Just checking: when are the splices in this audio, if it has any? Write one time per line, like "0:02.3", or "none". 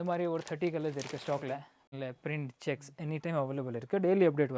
0:01.9